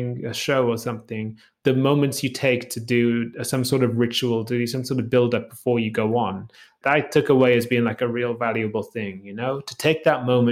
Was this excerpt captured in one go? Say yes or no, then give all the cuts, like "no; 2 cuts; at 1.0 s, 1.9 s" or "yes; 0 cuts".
no; 2 cuts; at 1.6 s, 6.8 s